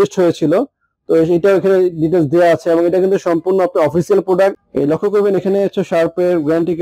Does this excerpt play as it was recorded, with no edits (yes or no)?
no